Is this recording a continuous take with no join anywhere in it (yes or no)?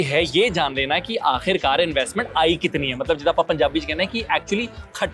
yes